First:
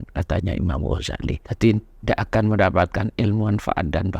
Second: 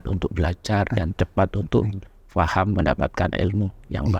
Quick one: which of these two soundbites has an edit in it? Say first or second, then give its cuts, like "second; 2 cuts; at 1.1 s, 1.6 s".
first; 1 cut; at 1.5 s